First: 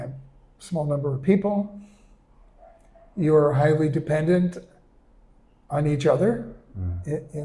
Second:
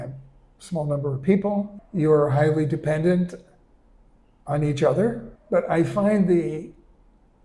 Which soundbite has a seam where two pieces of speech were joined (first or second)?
second